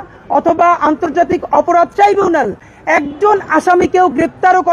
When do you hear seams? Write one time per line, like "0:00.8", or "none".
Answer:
none